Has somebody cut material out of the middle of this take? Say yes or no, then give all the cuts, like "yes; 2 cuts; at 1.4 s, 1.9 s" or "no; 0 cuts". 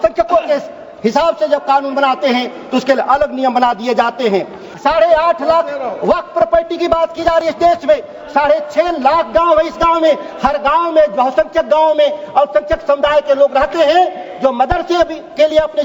yes; 1 cut; at 4.7 s